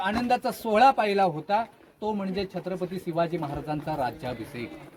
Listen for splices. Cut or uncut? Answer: uncut